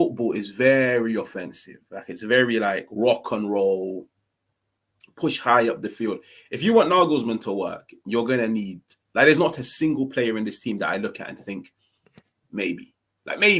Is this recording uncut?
yes; 0 cuts

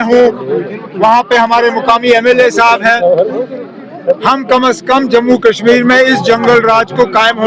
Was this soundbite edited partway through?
no; 0 cuts

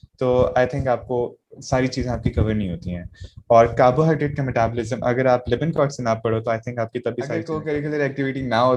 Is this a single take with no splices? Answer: no; 1 cut; at 7.5 s

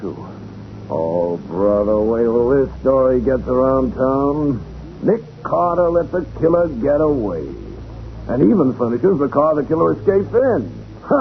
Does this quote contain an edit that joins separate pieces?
yes; 1 cut; at 1.5 s

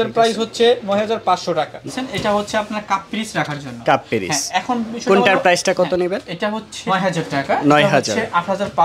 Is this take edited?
yes; 2 cuts; at 1.9 s, 6.8 s

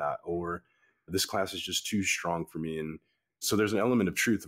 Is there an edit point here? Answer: yes; 2 cuts; at 1.1 s, 3.4 s

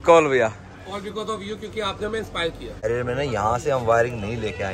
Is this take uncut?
no; 1 cut; at 2.8 s

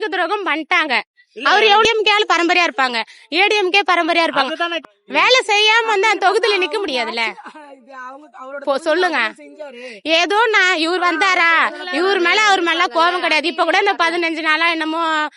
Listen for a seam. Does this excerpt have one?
no; 0 cuts

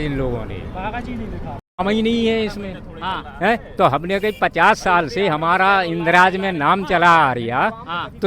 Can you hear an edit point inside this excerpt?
yes; 1 cut; at 1.7 s

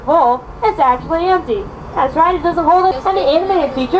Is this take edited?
no; 0 cuts

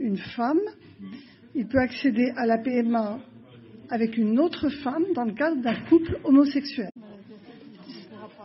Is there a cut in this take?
yes; 1 cut; at 7.1 s

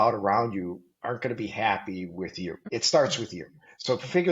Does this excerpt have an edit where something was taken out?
yes; 1 cut; at 2.9 s

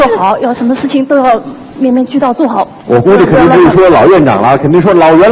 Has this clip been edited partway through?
no; 0 cuts

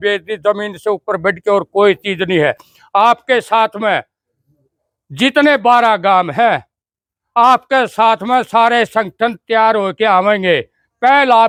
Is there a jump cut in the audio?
no; 0 cuts

